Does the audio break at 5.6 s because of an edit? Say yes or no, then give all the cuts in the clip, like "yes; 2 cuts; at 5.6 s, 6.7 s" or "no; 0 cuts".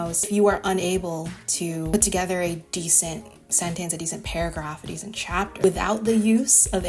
yes; 1 cut; at 5.6 s